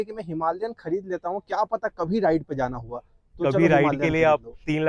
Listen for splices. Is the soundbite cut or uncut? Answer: uncut